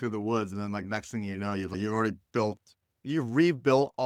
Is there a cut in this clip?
no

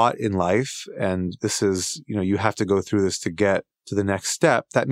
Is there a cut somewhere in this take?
yes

